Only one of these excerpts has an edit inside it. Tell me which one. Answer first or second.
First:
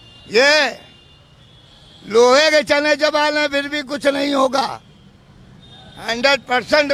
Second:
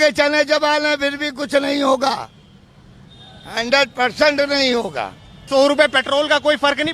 second